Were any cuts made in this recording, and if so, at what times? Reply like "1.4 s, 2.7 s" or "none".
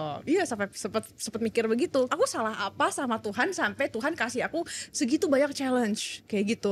2.1 s